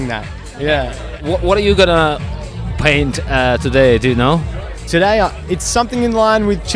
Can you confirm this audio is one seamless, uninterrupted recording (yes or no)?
no